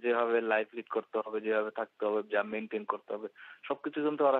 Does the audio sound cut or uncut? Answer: uncut